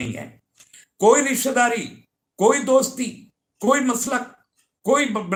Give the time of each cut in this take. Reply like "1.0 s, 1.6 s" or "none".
none